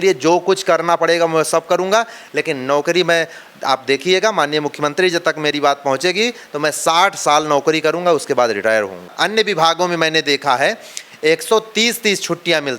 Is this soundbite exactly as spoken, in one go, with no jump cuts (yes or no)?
no